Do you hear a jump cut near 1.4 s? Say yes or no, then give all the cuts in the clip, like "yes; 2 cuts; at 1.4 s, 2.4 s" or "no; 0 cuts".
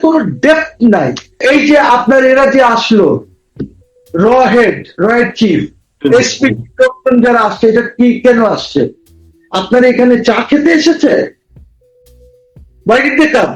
yes; 1 cut; at 1.4 s